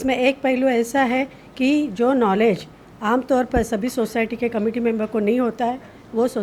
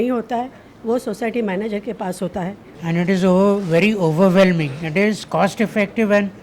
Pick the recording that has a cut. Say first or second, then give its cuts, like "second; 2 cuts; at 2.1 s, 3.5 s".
second; 1 cut; at 2.7 s